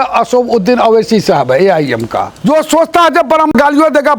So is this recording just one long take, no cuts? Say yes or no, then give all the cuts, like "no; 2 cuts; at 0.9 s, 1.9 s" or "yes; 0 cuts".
no; 1 cut; at 2.3 s